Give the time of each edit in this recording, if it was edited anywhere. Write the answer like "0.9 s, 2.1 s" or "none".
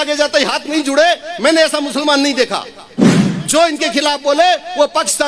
3.1 s